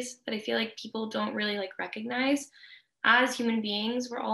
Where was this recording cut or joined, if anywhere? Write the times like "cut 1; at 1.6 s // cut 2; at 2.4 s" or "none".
none